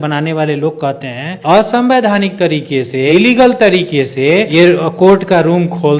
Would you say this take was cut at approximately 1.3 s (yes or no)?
yes